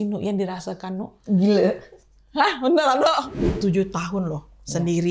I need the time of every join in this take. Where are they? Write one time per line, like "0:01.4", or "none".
0:03.4